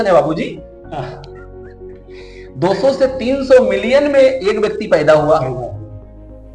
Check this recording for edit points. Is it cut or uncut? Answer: cut